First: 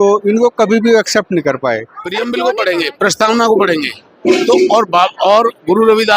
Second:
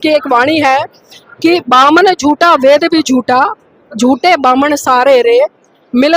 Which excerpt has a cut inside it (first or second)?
first